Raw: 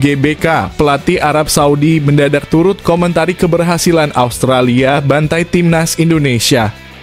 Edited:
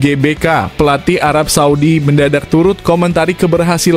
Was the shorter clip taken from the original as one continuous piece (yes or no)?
yes